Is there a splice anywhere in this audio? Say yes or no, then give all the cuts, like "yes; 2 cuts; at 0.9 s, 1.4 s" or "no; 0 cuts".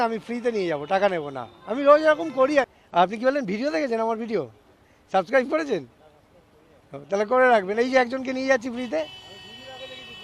yes; 1 cut; at 2.7 s